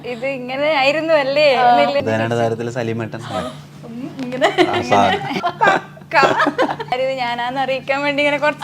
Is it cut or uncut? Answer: cut